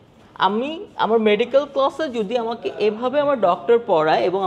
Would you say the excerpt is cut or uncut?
uncut